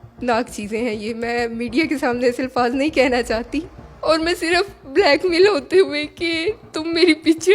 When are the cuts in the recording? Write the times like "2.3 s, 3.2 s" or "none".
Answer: none

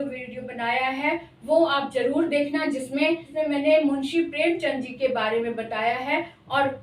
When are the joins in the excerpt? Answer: 3.3 s

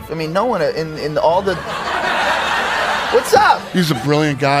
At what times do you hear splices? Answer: 3.7 s

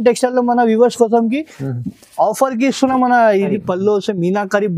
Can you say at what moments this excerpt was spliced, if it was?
3.5 s

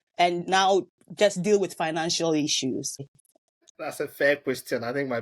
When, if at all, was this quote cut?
3.0 s

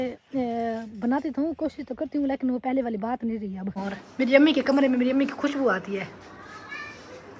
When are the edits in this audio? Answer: 3.8 s

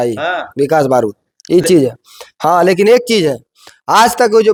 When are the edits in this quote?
none

